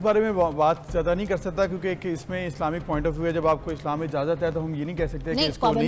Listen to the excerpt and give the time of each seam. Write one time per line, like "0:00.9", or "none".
none